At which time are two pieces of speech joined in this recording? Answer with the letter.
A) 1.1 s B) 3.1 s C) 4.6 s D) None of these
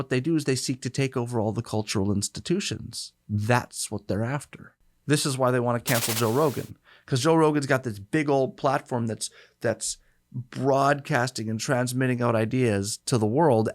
C